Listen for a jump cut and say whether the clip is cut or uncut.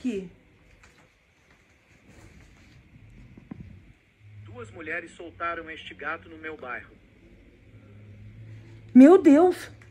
uncut